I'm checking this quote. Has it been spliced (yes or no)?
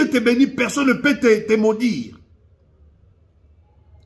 no